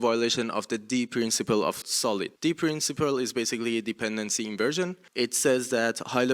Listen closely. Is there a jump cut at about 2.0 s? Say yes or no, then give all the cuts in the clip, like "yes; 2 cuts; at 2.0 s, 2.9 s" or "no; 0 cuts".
yes; 2 cuts; at 2.0 s, 5.0 s